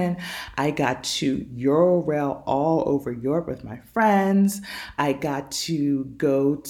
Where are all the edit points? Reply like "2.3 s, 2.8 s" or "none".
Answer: none